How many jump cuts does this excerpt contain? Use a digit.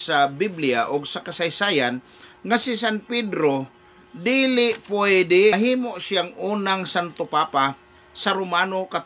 1